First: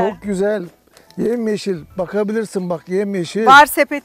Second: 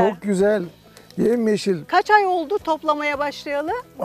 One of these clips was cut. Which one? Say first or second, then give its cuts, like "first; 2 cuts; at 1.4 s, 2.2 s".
second; 1 cut; at 1.9 s